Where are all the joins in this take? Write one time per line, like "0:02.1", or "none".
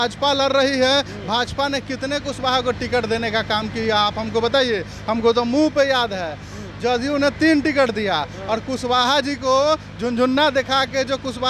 none

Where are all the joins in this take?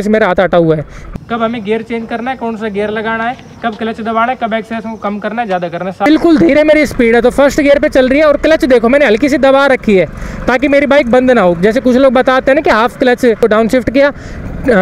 0:01.0
0:06.1
0:13.4

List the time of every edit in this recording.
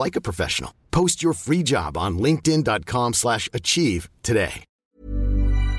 0:04.8

